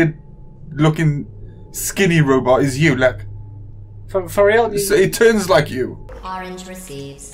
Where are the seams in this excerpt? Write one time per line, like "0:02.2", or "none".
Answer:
0:06.1

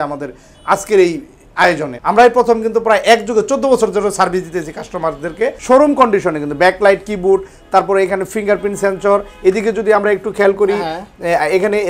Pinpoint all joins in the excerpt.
0:01.9
0:05.6

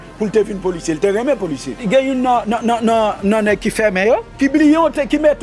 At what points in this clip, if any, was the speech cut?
0:01.8
0:04.3

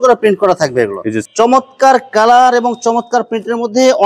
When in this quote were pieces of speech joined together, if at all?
0:01.2

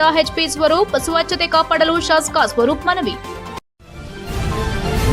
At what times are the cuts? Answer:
0:03.4

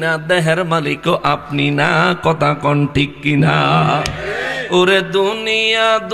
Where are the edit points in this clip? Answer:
none

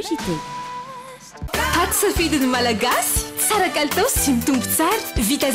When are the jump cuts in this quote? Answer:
0:01.3

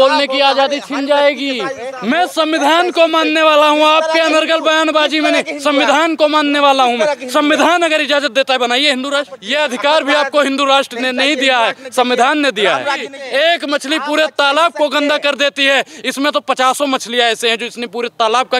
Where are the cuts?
0:01.9
0:09.4
0:13.1

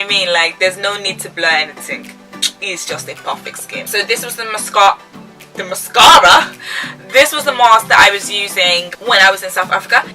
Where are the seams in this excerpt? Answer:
0:03.8

